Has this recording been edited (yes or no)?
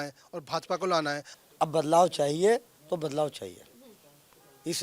yes